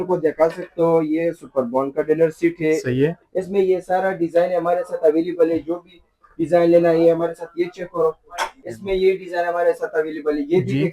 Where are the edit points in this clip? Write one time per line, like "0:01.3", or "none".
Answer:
0:03.2
0:08.7